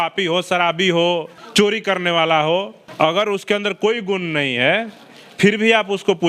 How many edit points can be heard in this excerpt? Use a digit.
2